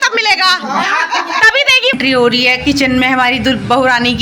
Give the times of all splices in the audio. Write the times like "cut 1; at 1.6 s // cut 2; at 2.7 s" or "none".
cut 1; at 1.9 s